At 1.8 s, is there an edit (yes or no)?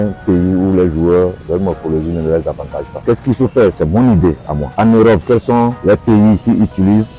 no